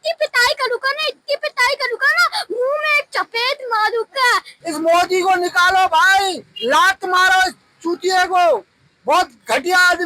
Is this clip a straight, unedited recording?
no; 1 cut; at 4.5 s

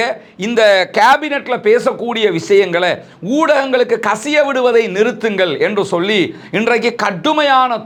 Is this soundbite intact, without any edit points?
yes; 0 cuts

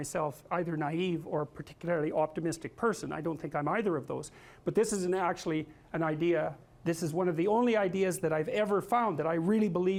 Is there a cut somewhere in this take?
no; 0 cuts

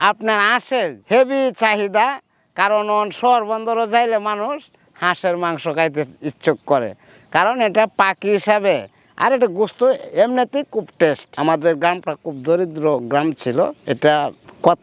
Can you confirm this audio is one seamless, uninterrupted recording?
no; 1 cut; at 11.3 s

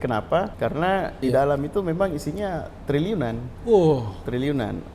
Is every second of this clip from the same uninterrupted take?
no; 1 cut; at 1.0 s

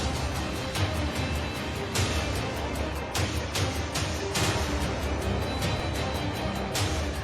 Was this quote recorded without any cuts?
yes; 0 cuts

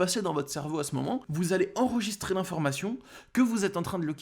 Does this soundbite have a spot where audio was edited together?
yes; 1 cut; at 1.3 s

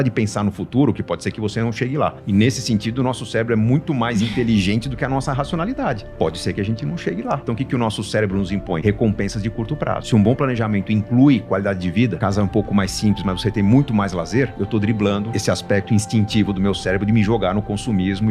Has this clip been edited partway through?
yes; 7 cuts; at 2.2 s, 7.4 s, 8.8 s, 10.0 s, 12.2 s, 14.6 s, 15.3 s

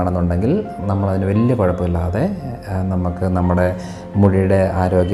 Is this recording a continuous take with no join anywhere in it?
yes; 0 cuts

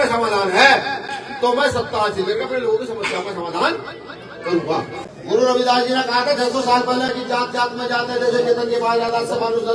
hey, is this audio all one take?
no; 1 cut; at 5.1 s

